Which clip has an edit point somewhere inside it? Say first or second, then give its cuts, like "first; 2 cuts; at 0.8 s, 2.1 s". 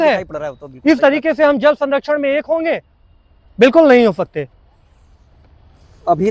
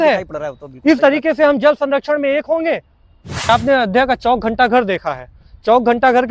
second; 1 cut; at 3.5 s